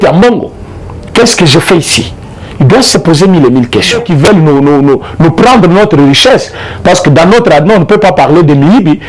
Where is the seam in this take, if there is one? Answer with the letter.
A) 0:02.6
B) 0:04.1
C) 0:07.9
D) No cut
B